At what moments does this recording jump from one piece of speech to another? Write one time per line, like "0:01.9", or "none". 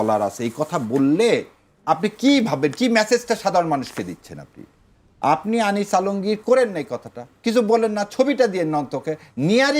none